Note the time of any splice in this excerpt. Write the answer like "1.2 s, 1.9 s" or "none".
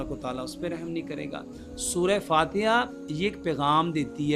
none